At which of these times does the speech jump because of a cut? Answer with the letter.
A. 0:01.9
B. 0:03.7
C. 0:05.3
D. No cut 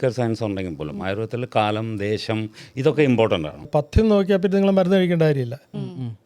B